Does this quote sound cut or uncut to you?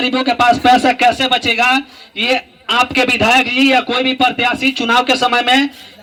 uncut